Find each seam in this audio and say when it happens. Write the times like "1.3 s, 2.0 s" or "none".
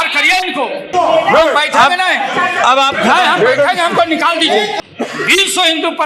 0.9 s, 4.7 s

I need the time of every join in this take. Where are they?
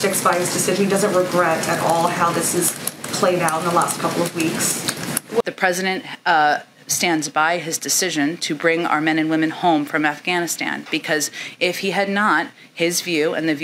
5.4 s

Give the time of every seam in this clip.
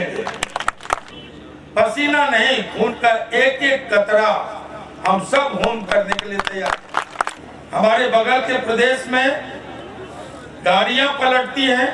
1.0 s, 7.3 s

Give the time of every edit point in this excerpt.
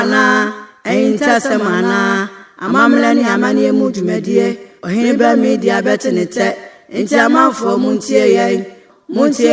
none

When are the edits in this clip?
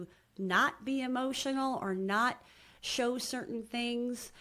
none

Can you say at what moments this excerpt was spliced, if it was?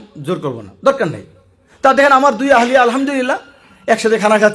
1.7 s

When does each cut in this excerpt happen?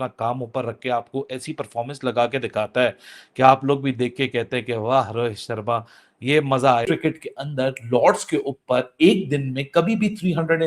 6.9 s

